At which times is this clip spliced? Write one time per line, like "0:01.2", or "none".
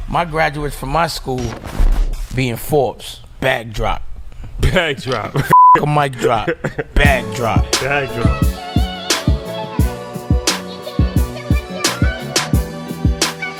none